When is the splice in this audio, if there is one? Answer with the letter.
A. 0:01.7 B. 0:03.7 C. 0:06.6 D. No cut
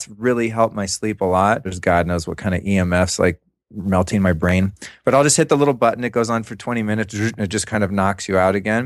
A